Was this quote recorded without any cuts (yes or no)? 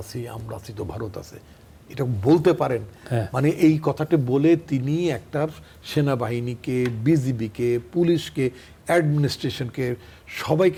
yes